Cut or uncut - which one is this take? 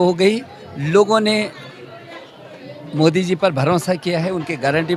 uncut